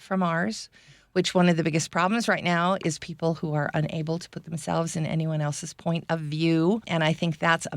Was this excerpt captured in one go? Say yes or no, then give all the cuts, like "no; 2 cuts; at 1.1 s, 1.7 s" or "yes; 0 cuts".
no; 1 cut; at 6.8 s